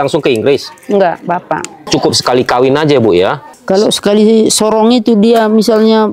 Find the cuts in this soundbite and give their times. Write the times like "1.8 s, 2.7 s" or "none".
1.9 s, 3.5 s